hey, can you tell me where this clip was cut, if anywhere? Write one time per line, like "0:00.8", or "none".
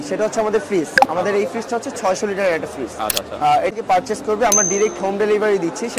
0:03.8